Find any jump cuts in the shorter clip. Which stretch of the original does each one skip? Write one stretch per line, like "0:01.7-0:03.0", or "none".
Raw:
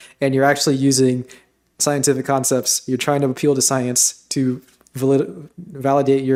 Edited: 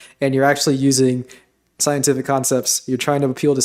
none